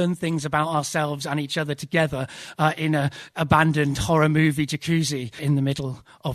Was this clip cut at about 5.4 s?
yes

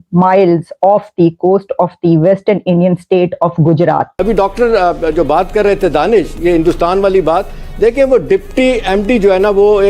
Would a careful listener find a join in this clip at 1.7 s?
no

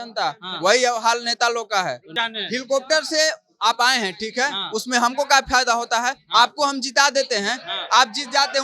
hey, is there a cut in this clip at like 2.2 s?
yes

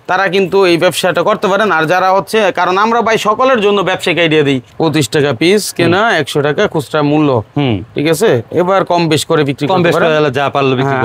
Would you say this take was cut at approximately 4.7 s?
yes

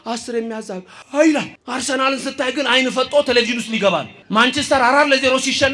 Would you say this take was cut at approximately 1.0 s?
yes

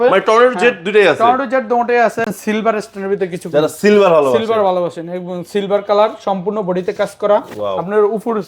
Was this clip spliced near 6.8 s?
no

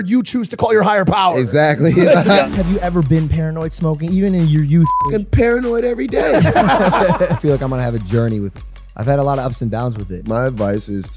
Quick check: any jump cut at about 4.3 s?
no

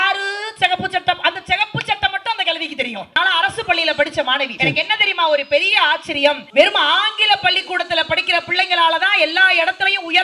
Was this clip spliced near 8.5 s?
no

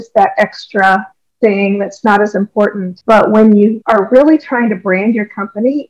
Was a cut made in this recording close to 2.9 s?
yes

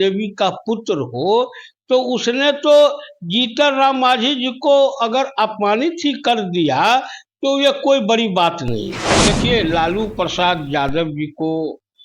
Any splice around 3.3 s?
no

